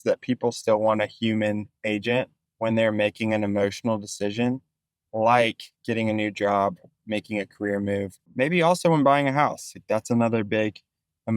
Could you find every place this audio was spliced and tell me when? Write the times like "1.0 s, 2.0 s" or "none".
2.4 s, 5.7 s, 8.3 s